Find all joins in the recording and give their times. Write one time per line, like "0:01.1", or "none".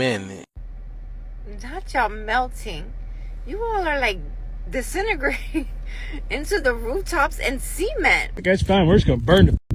0:08.3